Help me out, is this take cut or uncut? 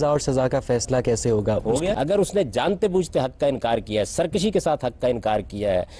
cut